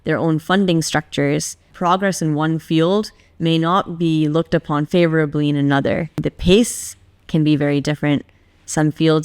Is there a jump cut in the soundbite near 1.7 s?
yes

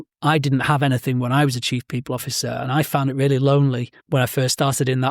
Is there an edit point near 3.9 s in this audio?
yes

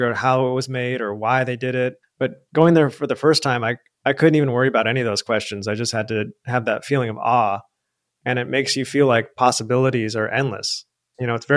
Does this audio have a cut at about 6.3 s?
no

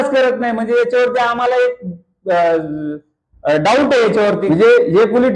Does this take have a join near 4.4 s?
yes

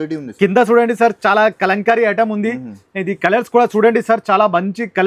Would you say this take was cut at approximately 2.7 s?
no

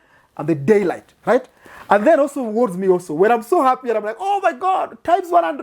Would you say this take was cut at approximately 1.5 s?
no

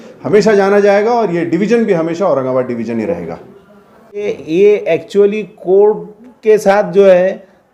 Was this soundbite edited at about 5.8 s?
no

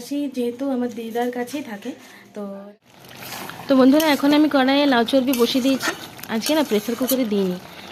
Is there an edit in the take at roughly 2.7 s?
yes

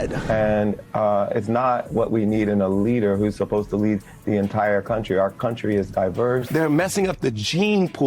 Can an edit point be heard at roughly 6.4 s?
yes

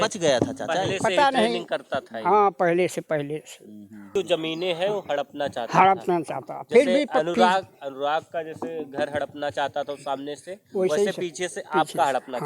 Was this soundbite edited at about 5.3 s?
no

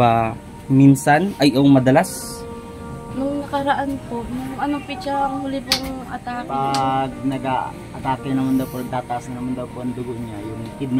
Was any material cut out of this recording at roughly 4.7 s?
no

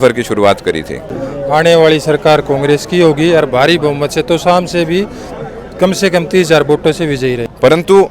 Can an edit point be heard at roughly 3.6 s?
no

